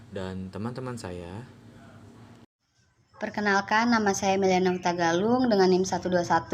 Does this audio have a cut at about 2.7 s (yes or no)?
yes